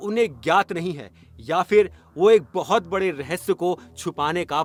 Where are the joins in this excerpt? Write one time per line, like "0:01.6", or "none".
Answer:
none